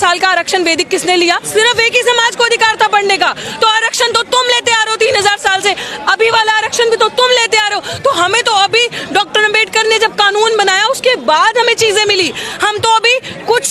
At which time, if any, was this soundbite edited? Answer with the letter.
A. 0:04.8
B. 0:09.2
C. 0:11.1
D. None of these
D